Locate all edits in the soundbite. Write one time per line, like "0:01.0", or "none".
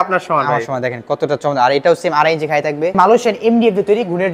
0:03.0